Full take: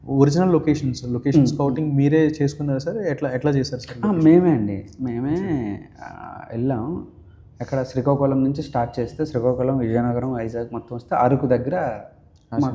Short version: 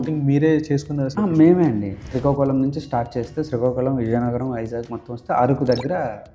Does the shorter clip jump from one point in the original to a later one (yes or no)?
yes